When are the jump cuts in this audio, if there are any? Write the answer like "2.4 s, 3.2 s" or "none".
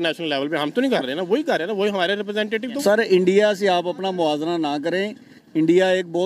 2.8 s